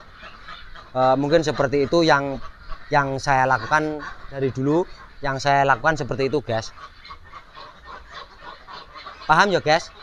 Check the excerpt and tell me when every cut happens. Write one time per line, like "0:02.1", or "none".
0:04.3